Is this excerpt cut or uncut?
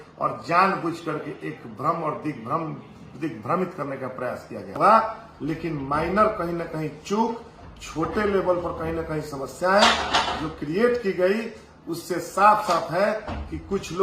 cut